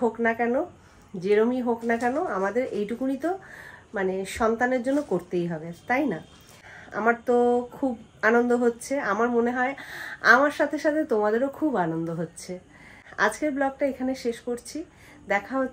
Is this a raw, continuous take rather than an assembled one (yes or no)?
yes